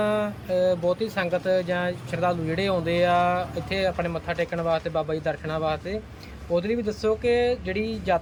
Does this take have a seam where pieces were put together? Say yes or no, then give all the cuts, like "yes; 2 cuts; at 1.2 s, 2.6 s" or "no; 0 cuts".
no; 0 cuts